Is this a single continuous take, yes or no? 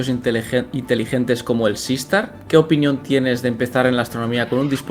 yes